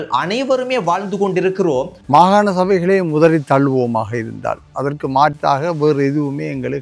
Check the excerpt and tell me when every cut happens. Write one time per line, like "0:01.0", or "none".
0:02.0